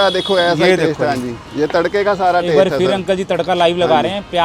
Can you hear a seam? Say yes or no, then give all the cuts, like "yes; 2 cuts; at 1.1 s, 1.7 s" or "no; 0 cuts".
no; 0 cuts